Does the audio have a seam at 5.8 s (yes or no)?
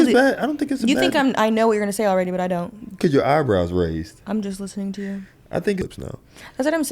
yes